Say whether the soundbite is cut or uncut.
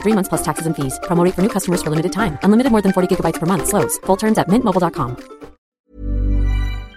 cut